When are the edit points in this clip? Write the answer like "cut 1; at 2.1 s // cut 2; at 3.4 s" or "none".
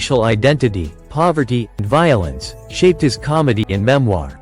cut 1; at 1.8 s